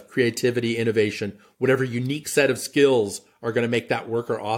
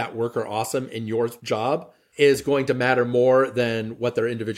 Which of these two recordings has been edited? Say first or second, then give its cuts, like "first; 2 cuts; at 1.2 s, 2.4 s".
second; 1 cut; at 1.6 s